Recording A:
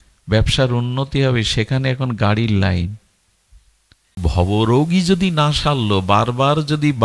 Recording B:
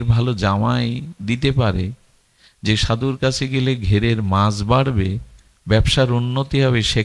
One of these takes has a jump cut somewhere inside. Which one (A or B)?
A